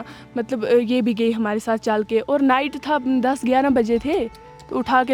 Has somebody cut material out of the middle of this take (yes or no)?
no